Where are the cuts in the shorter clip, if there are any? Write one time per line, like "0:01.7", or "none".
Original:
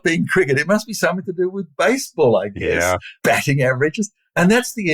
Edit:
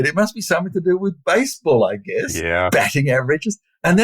none